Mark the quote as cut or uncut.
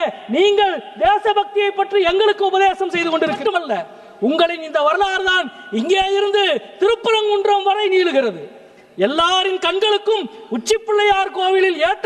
cut